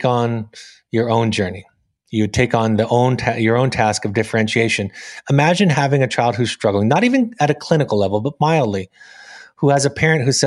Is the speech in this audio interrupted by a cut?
no; 0 cuts

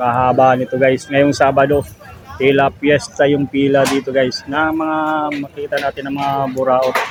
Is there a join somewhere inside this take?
no; 0 cuts

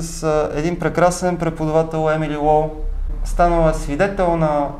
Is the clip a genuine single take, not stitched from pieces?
no; 1 cut; at 3.1 s

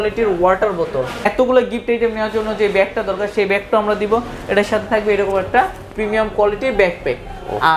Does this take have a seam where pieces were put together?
yes; 1 cut; at 1.2 s

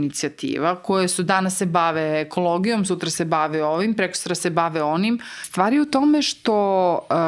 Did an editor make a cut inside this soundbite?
yes; 1 cut; at 5.4 s

